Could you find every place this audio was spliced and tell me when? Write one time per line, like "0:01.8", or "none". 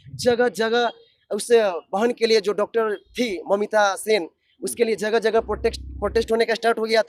none